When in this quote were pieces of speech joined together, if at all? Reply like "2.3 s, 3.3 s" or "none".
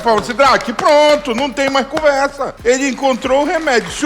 2.5 s